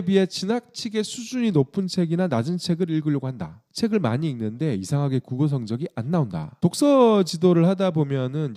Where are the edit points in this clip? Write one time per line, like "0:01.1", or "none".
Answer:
none